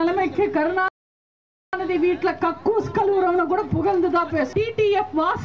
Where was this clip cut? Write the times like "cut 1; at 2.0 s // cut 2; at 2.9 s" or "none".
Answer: cut 1; at 4.5 s